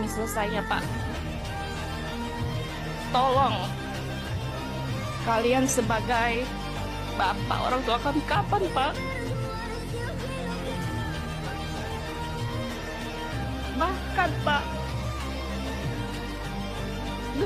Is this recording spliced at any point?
no; 0 cuts

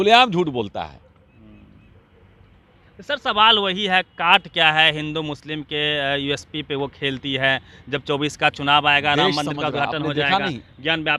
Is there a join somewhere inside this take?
no; 0 cuts

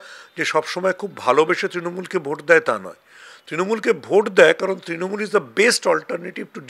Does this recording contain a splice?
no; 0 cuts

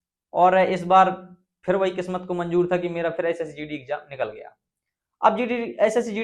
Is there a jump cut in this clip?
no; 0 cuts

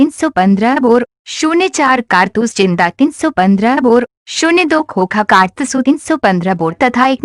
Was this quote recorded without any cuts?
yes; 0 cuts

